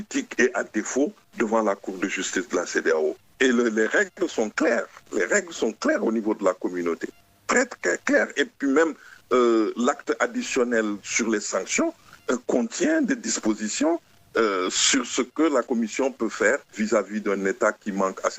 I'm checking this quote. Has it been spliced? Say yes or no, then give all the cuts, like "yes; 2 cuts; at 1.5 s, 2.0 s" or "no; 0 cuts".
yes; 3 cuts; at 3.3 s, 15.7 s, 16.7 s